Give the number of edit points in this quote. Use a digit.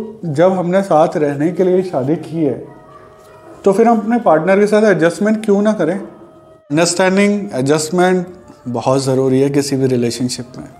1